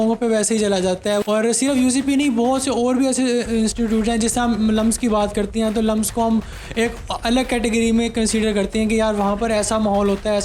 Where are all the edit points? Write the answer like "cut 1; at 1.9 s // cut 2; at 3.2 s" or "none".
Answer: cut 1; at 1.2 s